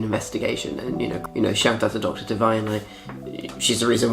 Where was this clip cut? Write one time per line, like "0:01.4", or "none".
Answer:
0:01.2